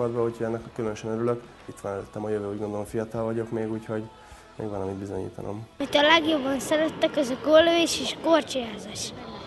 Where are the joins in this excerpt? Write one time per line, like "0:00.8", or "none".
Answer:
0:05.6